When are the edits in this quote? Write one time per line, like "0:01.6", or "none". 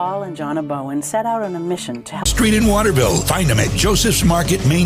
0:02.3

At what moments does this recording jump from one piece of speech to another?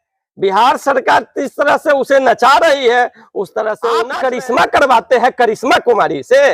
0:04.1

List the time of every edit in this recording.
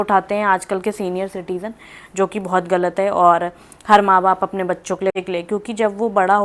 0:05.1

